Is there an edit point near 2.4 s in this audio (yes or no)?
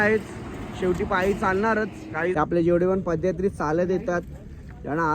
yes